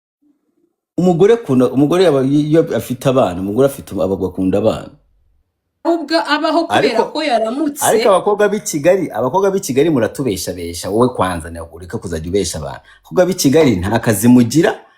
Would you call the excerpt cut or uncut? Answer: cut